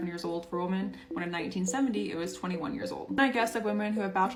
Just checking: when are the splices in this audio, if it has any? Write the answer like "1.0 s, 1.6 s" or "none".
none